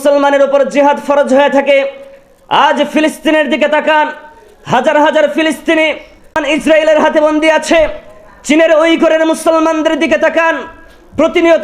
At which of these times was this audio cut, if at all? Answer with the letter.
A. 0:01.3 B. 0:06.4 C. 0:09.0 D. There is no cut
B